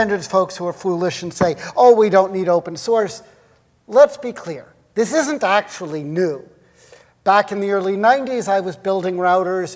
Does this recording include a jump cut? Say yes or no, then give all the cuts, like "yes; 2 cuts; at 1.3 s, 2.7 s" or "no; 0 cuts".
no; 0 cuts